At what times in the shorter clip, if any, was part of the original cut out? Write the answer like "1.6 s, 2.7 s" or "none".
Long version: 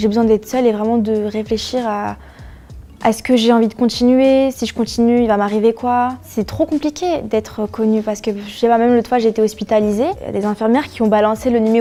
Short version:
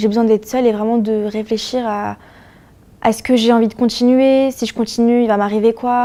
none